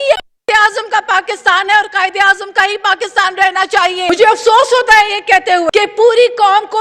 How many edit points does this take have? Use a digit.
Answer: 2